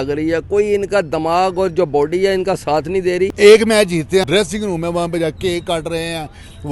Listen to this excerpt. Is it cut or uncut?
cut